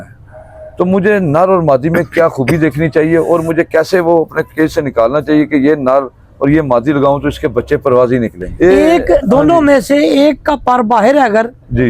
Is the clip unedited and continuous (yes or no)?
no